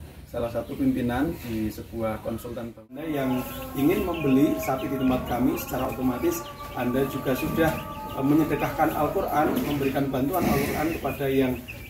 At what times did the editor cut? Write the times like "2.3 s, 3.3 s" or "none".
3.0 s